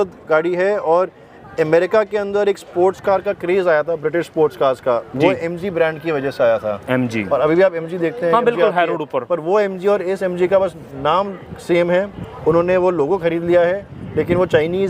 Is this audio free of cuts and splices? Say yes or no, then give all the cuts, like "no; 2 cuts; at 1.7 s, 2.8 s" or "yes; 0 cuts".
yes; 0 cuts